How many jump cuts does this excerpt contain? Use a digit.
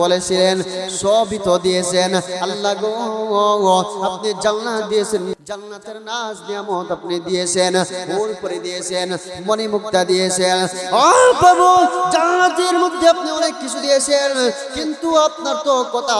1